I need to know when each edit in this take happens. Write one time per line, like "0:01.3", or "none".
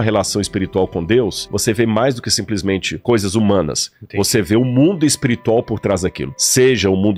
none